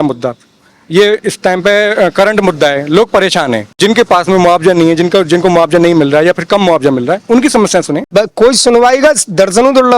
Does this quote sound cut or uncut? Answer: cut